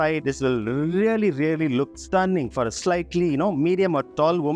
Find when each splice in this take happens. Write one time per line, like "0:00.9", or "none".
none